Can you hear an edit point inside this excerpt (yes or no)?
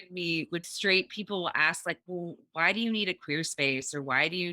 no